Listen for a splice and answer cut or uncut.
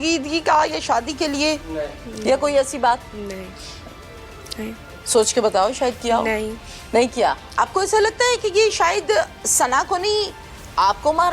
cut